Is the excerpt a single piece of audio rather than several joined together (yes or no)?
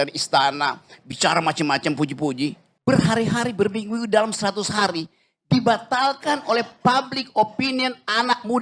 no